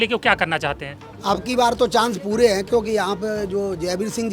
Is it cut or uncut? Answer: cut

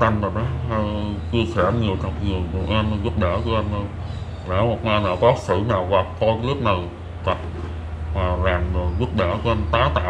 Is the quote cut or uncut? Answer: uncut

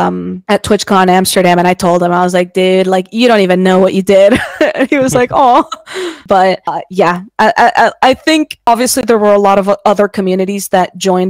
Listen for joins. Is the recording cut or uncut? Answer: uncut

